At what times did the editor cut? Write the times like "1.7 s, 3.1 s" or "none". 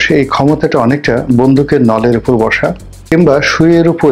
2.9 s